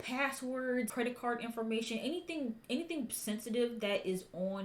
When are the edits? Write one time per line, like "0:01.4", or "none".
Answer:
0:00.9